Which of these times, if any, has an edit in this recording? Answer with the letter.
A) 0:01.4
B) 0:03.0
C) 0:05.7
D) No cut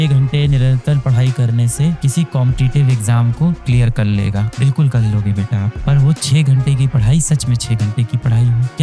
D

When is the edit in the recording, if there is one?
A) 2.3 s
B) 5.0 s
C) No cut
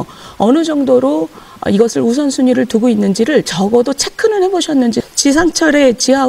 B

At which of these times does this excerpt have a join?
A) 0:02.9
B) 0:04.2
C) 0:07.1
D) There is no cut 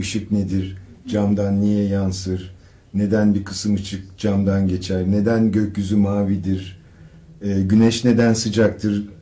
A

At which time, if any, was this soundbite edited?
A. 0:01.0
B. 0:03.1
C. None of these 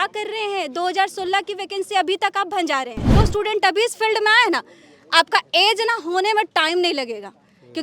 B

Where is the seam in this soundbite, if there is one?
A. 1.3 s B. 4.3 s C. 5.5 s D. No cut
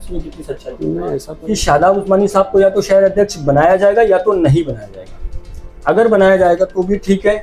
A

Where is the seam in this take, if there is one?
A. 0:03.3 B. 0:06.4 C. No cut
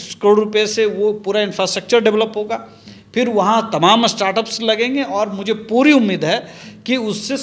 C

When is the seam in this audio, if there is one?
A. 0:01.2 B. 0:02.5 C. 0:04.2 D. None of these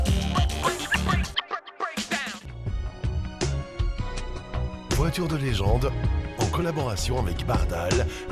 B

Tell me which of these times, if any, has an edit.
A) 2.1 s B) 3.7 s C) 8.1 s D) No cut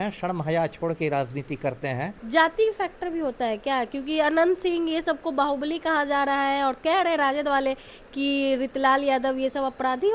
A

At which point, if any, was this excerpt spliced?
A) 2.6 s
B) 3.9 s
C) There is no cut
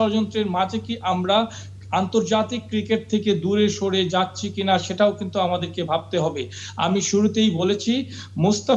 C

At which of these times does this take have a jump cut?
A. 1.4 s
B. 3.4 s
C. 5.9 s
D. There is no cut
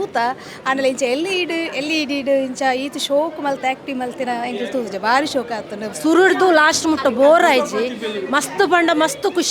C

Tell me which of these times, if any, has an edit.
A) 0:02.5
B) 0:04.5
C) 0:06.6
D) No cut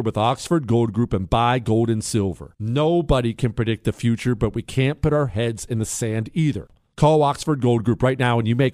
C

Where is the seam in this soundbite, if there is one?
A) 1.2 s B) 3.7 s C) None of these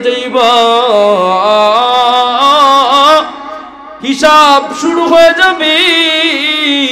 C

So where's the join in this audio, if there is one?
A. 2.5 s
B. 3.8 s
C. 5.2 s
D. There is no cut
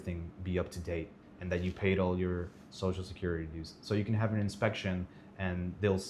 D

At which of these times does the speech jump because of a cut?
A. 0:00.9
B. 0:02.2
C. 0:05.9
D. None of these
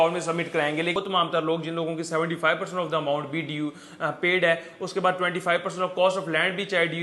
A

